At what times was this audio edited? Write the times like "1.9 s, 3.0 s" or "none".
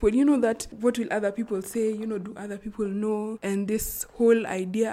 3.4 s